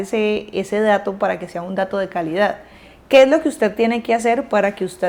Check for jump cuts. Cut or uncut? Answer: uncut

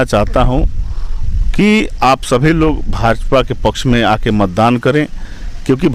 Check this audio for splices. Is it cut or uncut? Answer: uncut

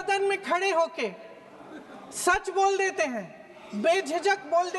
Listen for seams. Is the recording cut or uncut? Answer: uncut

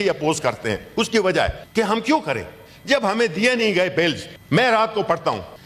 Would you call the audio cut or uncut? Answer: cut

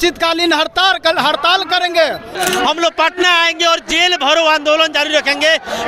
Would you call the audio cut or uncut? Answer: cut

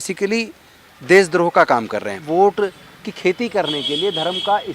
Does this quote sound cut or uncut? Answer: cut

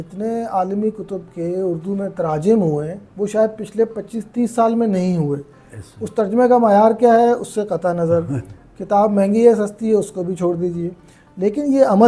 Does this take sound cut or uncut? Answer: uncut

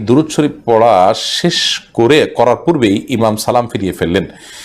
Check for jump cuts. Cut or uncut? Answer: uncut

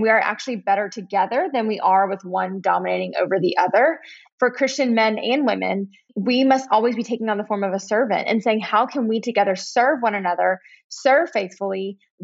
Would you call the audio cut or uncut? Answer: cut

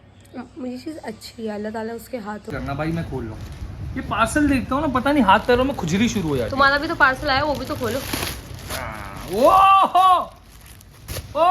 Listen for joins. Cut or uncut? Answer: cut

